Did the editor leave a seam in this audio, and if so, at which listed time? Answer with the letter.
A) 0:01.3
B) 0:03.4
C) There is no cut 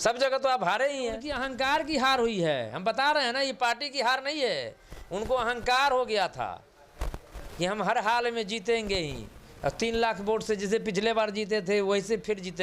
A